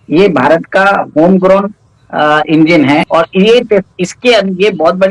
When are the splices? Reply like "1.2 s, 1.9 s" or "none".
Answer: 3.0 s